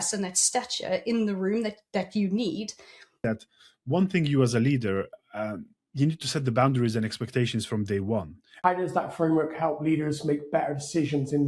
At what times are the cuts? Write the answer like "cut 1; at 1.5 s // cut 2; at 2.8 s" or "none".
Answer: cut 1; at 3.1 s // cut 2; at 8.4 s